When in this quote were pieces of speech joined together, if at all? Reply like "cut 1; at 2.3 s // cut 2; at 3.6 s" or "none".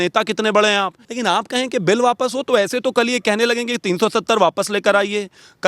cut 1; at 1.0 s